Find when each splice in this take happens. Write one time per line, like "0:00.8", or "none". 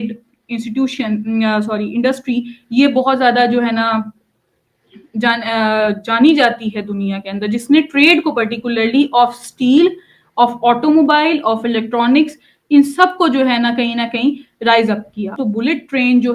0:15.4